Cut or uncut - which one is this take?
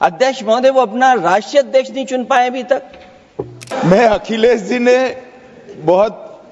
cut